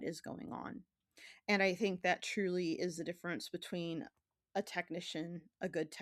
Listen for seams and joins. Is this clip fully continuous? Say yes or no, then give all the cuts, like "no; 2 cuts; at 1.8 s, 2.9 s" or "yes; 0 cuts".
yes; 0 cuts